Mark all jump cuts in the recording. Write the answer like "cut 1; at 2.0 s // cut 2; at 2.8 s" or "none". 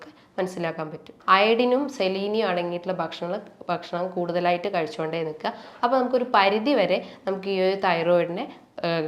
cut 1; at 1.1 s

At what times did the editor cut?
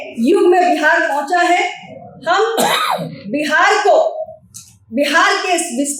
none

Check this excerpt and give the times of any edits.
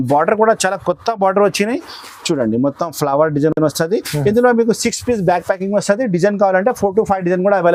none

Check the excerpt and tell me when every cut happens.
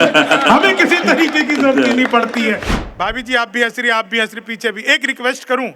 cut 1; at 2.7 s

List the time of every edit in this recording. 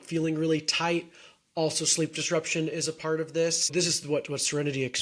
cut 1; at 3.7 s

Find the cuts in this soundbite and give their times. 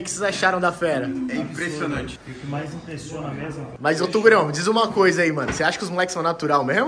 cut 1; at 2.2 s // cut 2; at 3.7 s

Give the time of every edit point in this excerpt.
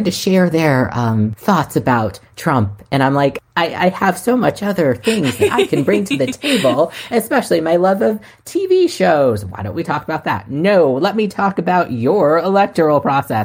cut 1; at 1.4 s // cut 2; at 3.4 s

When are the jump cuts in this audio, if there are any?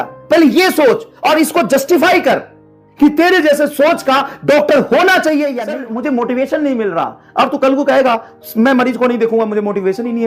cut 1; at 5.6 s

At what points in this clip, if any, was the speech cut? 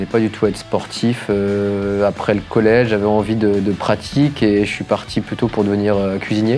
none

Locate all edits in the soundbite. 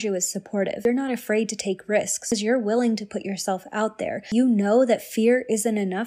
cut 1; at 0.8 s // cut 2; at 2.3 s // cut 3; at 4.3 s

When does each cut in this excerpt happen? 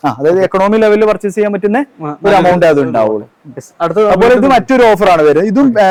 none

